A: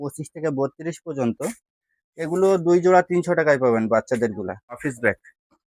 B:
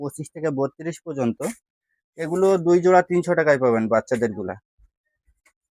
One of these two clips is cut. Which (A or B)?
A